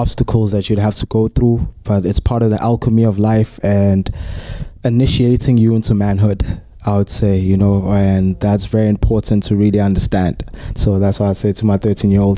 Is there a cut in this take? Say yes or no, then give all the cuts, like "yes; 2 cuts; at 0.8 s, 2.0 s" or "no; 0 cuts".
no; 0 cuts